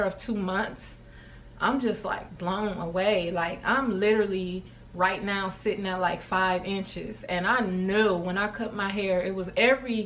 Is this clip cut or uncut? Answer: uncut